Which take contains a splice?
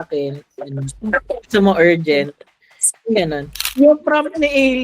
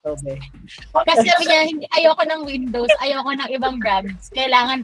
first; 1 cut; at 3.6 s

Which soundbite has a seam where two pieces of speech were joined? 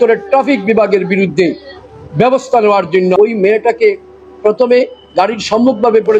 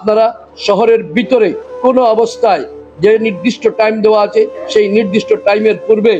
first; 1 cut; at 3.1 s

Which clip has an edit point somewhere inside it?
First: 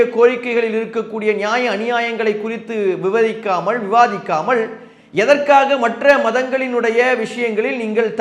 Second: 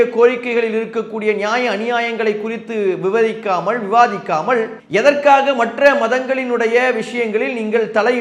second; 1 cut; at 4.8 s

